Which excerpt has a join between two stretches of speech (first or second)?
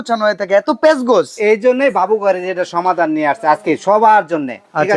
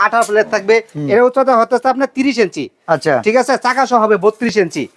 second